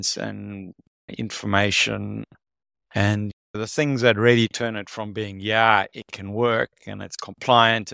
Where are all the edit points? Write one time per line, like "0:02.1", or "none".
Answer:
none